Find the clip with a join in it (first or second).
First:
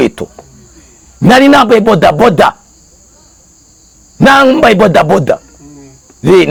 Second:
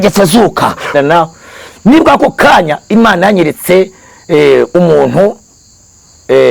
second